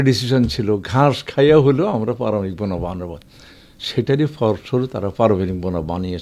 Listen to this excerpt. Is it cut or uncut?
uncut